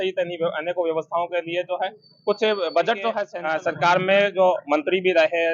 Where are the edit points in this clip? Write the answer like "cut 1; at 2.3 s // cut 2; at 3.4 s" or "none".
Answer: cut 1; at 3.3 s